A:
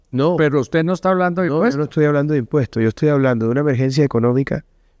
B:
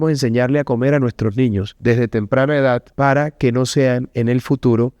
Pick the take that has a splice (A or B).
B